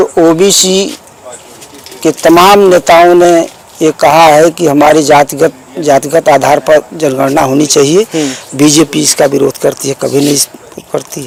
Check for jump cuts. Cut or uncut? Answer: uncut